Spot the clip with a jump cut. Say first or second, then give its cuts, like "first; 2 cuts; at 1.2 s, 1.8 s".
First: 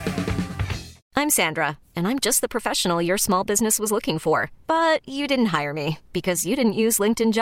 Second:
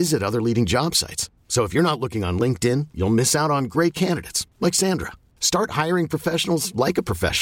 first; 1 cut; at 0.9 s